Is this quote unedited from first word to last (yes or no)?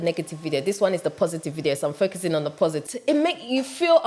no